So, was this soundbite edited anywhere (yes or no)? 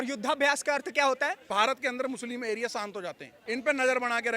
yes